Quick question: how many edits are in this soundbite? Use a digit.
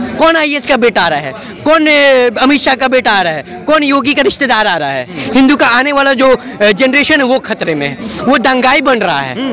1